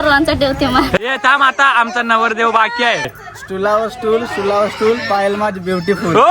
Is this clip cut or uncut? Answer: cut